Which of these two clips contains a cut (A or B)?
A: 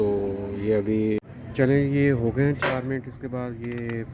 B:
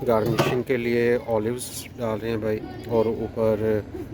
A